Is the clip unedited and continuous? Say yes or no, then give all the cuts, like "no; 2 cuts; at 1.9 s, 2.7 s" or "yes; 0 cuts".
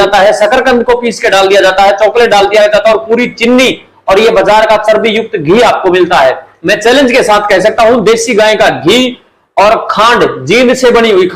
yes; 0 cuts